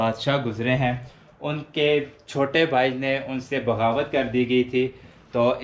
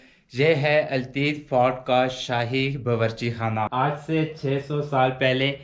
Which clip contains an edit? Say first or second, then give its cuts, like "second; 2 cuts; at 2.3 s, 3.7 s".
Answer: second; 1 cut; at 3.7 s